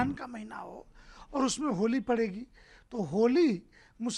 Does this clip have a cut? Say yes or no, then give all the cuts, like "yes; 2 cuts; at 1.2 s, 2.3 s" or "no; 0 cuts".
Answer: no; 0 cuts